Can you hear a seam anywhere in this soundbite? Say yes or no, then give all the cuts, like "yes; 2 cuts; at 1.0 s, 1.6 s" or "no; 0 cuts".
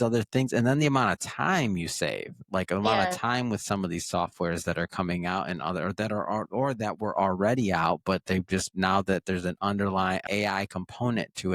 yes; 1 cut; at 10.2 s